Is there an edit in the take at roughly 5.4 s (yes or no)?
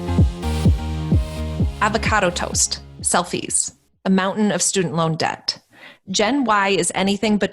no